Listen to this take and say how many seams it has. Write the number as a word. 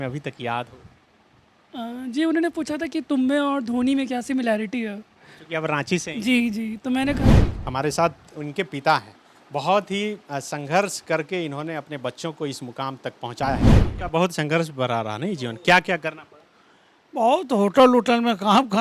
two